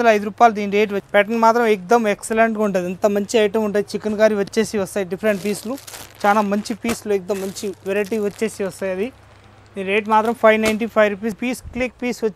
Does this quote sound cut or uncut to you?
cut